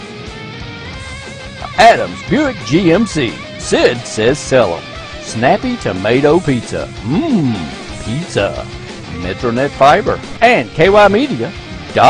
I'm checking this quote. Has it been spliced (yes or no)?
yes